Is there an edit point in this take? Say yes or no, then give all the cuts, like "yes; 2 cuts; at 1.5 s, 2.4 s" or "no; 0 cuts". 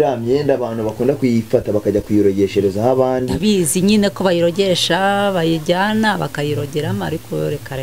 no; 0 cuts